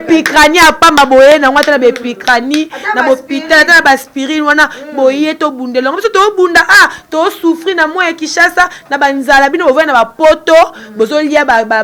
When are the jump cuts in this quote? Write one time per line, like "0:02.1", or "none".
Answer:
none